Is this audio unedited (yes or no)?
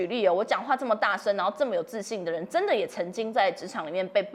yes